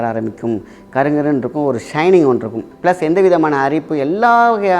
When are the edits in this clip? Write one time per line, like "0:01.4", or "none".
0:02.6